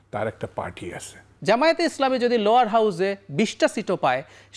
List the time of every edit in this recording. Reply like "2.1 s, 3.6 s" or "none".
1.3 s